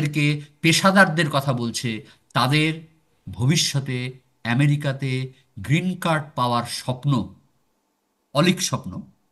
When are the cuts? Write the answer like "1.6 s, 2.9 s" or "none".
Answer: none